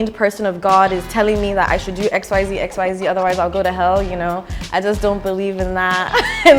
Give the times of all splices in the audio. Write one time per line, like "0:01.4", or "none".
none